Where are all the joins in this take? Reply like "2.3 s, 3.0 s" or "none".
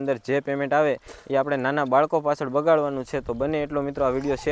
none